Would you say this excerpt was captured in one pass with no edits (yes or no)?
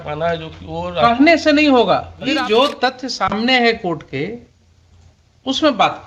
no